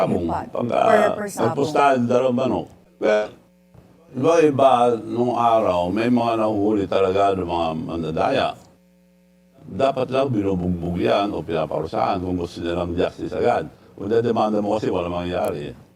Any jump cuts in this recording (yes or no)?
yes